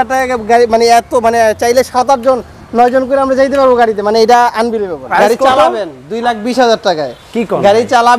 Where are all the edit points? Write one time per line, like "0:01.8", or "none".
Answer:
0:05.1